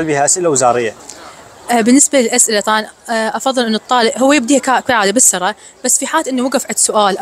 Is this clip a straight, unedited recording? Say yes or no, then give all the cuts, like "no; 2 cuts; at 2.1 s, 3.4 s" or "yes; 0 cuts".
yes; 0 cuts